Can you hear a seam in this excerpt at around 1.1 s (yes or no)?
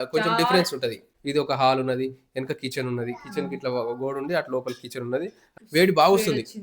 yes